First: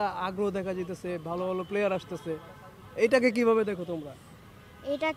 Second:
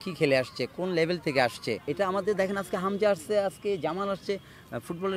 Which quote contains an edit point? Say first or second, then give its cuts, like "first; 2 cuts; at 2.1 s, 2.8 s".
second; 1 cut; at 1.8 s